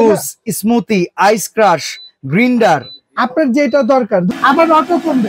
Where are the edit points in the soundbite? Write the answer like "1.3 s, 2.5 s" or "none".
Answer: 4.3 s